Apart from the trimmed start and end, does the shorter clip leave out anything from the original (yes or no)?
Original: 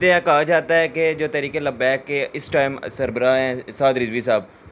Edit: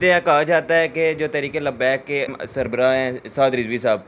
yes